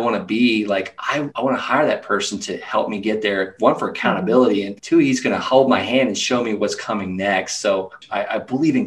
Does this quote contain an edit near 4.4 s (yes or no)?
no